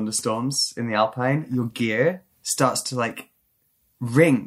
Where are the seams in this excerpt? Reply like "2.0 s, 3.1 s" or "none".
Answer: 1.5 s